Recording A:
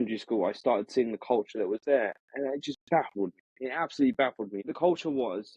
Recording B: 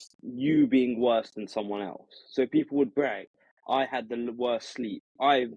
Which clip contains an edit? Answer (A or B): A